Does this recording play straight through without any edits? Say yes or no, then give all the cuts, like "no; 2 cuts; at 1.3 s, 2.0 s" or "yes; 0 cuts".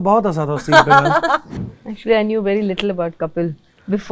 no; 1 cut; at 1.6 s